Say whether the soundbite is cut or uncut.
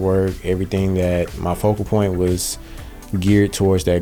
uncut